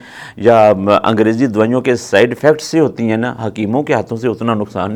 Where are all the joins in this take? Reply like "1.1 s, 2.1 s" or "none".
none